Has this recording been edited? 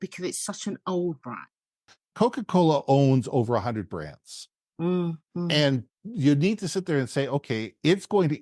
yes; 1 cut; at 1.9 s

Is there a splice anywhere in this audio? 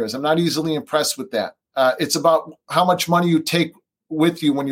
yes; 1 cut; at 1.6 s

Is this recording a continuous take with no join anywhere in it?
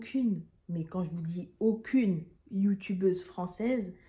yes; 0 cuts

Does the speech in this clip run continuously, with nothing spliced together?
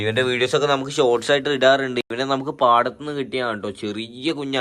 yes; 0 cuts

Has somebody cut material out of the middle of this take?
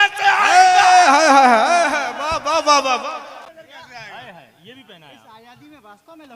yes; 1 cut; at 3.5 s

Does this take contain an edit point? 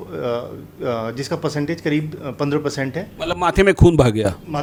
no; 0 cuts

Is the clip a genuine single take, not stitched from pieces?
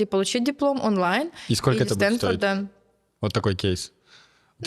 yes; 0 cuts

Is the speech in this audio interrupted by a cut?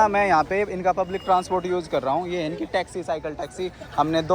no; 0 cuts

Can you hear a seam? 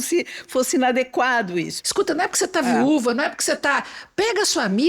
yes; 1 cut; at 1.8 s

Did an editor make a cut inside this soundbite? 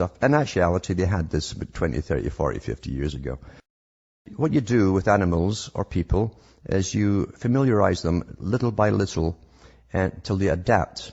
no; 0 cuts

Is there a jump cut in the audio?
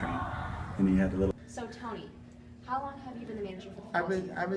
yes; 1 cut; at 1.3 s

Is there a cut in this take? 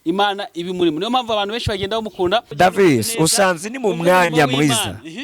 yes; 1 cut; at 2.5 s

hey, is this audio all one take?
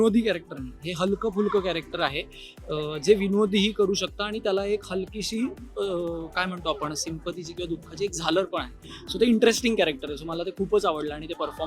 yes; 0 cuts

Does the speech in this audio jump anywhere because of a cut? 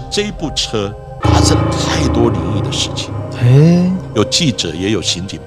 yes; 1 cut; at 1.0 s

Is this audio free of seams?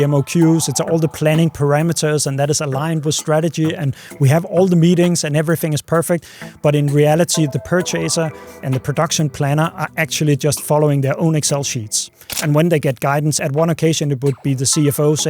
no; 4 cuts; at 7.5 s, 8.6 s, 12.4 s, 13.4 s

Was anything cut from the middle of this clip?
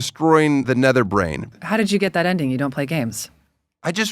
yes; 1 cut; at 1.5 s

